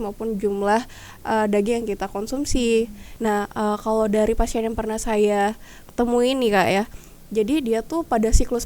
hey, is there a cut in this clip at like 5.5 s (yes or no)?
no